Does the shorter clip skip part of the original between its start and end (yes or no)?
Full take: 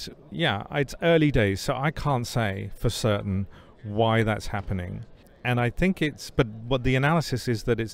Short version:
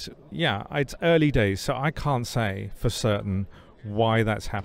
no